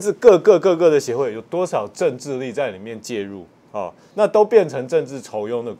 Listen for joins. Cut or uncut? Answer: uncut